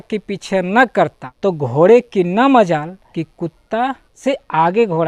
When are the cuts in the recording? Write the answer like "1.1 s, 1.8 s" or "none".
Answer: 1.2 s, 3.0 s, 4.1 s